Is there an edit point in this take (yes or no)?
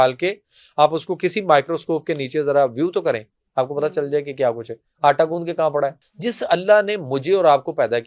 yes